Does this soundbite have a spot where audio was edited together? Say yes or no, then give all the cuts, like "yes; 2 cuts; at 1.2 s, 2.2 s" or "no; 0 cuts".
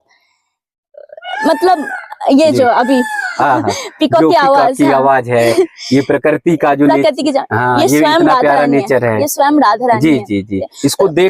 no; 0 cuts